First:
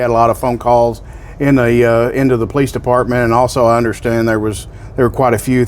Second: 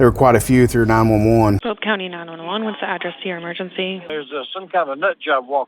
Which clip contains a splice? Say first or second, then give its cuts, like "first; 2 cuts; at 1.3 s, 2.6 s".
second; 2 cuts; at 1.7 s, 4.1 s